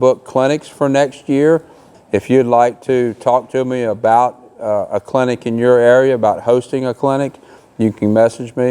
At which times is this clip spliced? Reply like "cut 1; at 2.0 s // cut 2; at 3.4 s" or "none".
cut 1; at 1.9 s